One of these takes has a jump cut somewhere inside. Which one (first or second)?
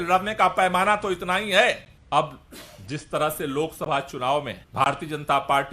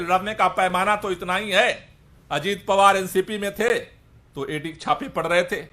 first